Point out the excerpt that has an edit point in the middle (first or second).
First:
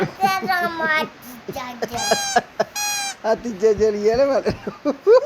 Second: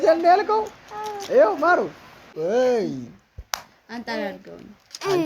second